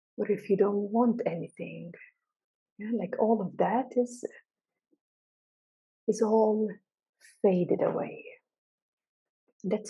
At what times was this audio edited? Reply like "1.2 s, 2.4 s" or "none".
none